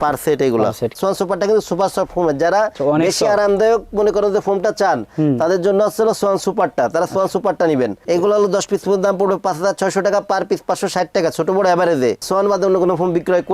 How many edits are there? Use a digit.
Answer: 2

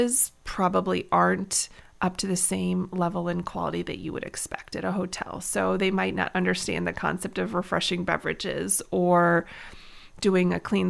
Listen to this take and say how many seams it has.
0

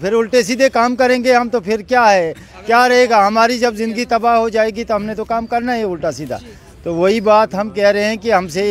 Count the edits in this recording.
0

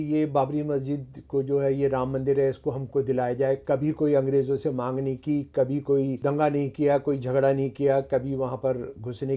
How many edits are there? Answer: 1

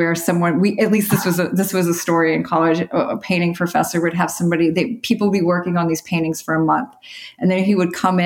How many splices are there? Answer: 0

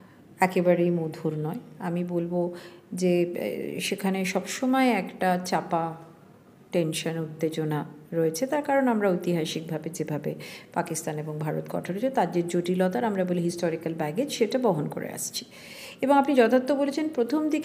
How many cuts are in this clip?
0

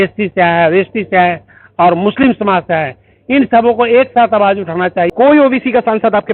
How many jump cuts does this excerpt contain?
1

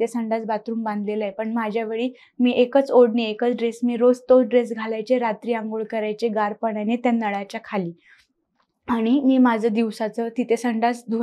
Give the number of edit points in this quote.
0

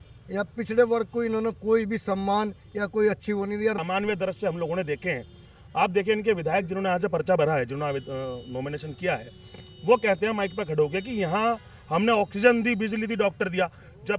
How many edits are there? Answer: 1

